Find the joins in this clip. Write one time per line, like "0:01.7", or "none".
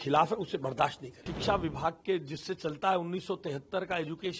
0:01.3